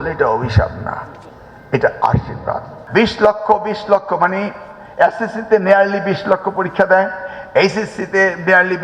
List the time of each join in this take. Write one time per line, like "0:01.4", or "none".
0:02.7